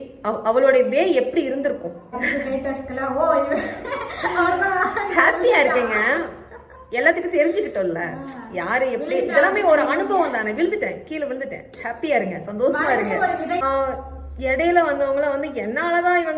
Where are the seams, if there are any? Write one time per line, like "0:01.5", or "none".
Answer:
0:02.1
0:13.6